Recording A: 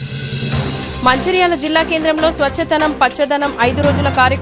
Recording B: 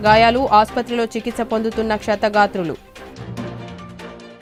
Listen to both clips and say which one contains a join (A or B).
A